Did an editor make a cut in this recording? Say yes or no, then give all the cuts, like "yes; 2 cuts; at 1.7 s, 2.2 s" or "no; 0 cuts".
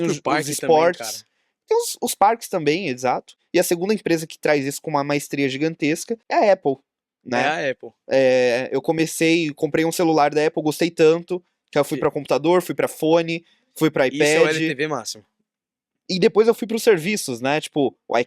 yes; 2 cuts; at 3.3 s, 6.2 s